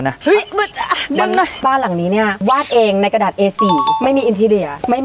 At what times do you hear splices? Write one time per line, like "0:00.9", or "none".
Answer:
0:01.6
0:04.0